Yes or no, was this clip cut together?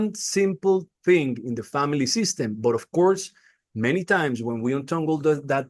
no